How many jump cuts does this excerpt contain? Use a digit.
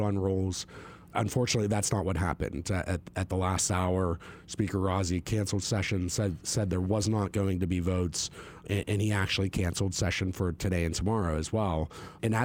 0